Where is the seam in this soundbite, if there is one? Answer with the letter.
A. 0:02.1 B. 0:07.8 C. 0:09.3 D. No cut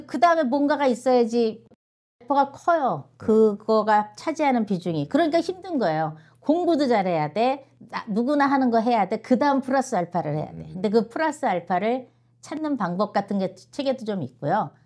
A